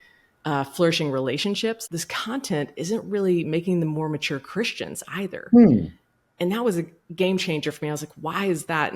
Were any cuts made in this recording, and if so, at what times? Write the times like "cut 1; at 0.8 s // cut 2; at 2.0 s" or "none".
cut 1; at 1.8 s